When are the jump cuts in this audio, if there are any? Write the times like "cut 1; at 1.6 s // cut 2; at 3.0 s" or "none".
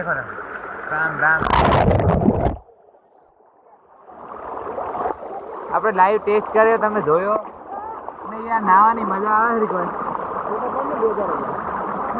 none